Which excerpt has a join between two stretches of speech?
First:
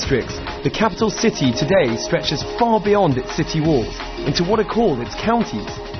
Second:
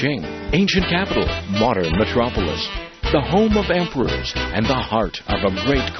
first; 1 cut; at 3.5 s

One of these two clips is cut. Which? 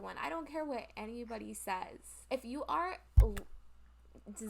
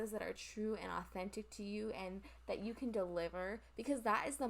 first; 1 cut; at 2.1 s

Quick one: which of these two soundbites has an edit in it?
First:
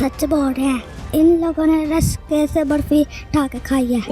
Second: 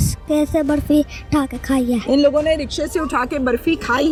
first; 1 cut; at 0.9 s

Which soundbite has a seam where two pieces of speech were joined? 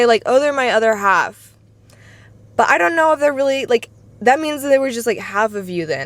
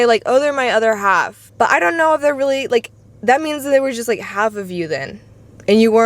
second; 1 cut; at 1.4 s

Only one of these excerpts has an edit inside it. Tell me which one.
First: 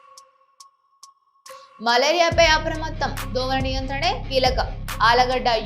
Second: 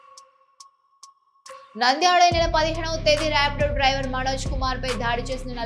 first; 1 cut; at 1.7 s

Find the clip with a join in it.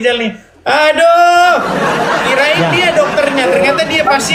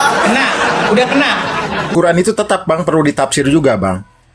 second; 1 cut; at 1.9 s

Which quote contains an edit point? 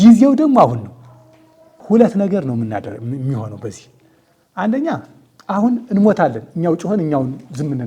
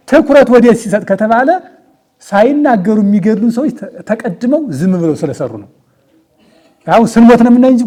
first; 1 cut; at 1.8 s

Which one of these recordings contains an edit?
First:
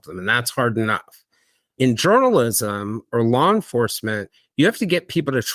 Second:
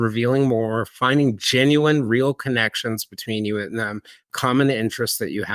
first; 1 cut; at 1.7 s

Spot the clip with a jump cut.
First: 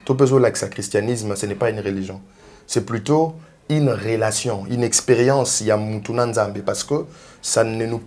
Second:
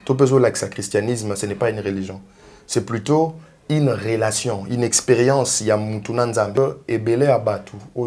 second; 1 cut; at 6.6 s

